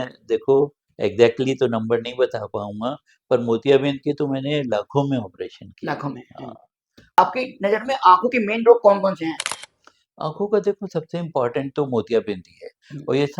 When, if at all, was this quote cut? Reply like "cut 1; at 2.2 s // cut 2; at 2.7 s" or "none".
cut 1; at 7.2 s

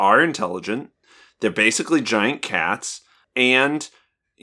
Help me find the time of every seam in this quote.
cut 1; at 3.2 s

